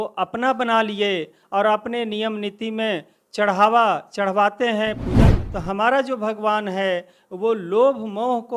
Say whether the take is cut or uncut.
cut